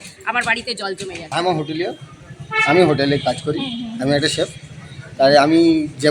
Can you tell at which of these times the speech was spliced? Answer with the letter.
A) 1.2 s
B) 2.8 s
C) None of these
A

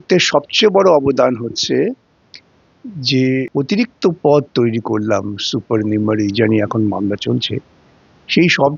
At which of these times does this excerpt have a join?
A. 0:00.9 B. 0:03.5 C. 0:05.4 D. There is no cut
B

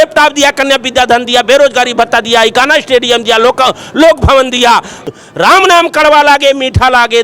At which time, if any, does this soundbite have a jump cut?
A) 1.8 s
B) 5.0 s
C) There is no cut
B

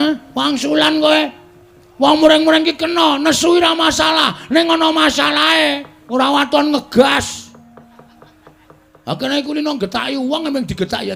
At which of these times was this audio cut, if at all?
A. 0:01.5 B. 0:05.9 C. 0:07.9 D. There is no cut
B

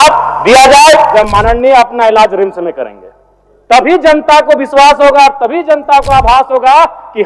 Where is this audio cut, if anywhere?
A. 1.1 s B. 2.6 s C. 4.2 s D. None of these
A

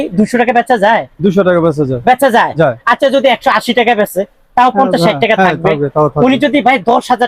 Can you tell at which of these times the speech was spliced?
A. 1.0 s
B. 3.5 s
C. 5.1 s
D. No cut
D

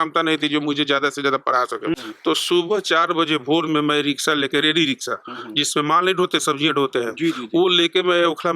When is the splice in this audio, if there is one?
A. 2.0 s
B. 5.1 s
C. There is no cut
A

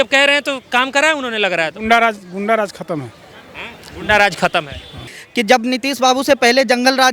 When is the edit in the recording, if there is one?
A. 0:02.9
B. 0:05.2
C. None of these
B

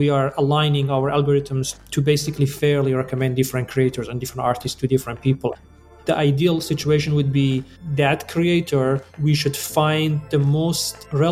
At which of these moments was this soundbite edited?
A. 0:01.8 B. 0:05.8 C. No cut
B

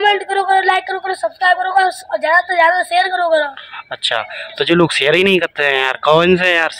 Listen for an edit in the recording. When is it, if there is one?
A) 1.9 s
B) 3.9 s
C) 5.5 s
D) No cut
D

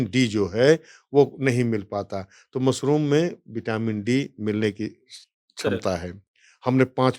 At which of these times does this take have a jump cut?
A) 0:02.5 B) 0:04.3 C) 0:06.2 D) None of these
C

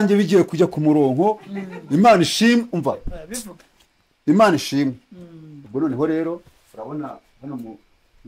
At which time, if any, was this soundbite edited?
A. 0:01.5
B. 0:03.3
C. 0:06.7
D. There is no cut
D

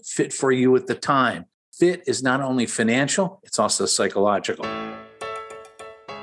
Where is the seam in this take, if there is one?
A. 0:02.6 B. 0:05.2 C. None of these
B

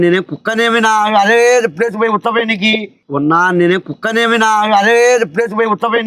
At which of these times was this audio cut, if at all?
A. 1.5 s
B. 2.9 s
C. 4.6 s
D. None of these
B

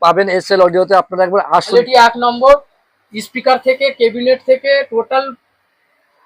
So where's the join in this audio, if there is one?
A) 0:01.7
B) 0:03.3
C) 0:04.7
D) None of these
A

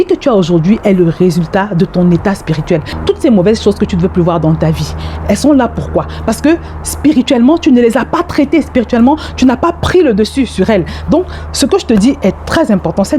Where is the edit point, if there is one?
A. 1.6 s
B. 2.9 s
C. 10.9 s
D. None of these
B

